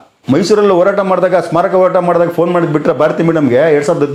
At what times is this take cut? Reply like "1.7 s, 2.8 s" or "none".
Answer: none